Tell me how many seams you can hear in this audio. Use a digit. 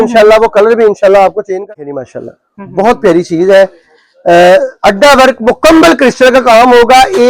1